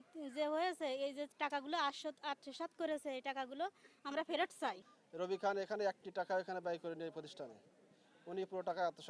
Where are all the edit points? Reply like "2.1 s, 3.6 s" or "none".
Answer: 4.9 s